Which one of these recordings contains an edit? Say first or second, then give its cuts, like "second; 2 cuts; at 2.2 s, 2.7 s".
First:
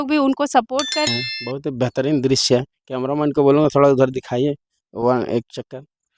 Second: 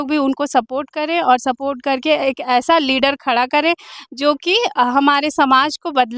first; 1 cut; at 1.1 s